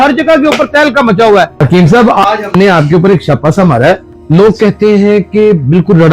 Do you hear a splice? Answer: yes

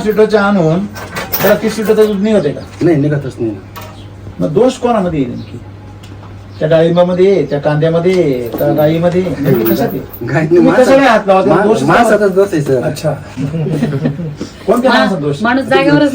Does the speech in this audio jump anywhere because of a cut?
no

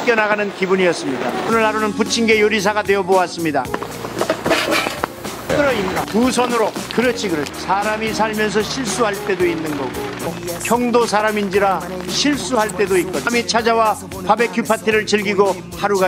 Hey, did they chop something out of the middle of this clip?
no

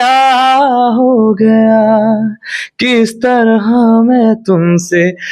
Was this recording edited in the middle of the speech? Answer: no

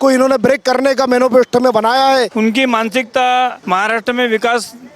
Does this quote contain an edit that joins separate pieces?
yes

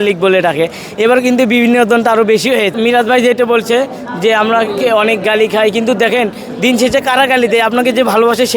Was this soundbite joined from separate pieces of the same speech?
yes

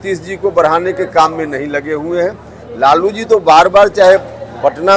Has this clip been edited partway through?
no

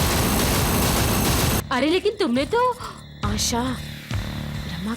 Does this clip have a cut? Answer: yes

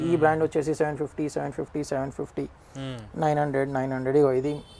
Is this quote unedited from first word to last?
yes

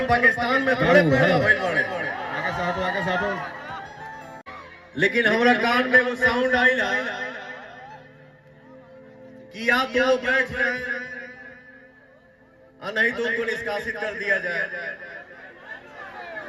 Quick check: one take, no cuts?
no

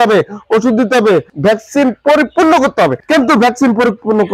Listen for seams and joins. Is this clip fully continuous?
no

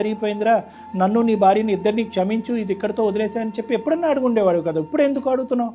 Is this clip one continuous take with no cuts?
yes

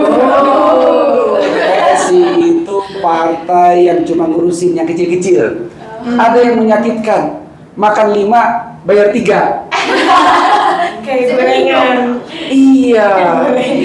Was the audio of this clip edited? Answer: no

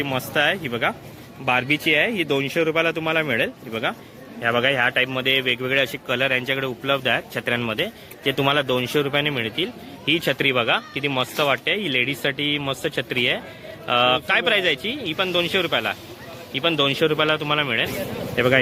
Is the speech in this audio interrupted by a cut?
no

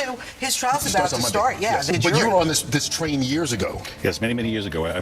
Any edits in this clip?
yes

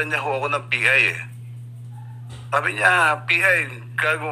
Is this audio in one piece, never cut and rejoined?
yes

